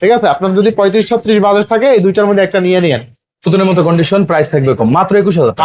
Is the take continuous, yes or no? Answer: no